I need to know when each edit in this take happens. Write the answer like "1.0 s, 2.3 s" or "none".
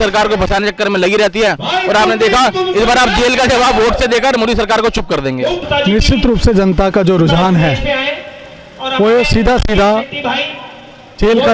none

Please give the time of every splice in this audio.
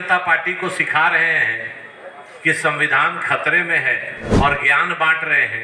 4.3 s

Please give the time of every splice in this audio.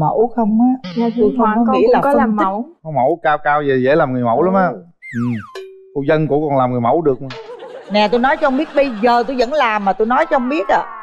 none

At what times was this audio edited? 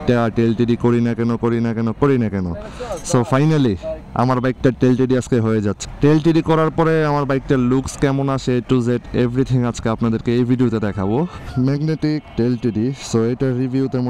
11.4 s

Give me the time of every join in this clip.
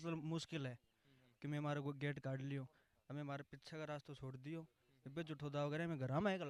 none

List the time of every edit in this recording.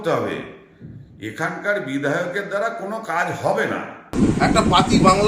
4.1 s

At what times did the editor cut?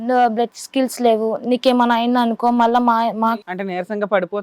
3.4 s

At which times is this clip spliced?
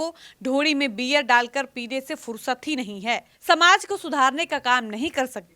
3.3 s

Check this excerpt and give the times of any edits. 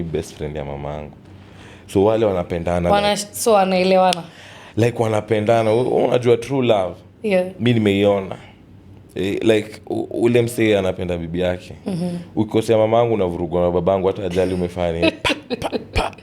none

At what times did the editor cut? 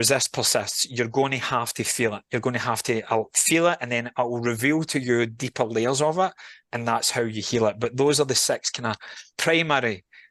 none

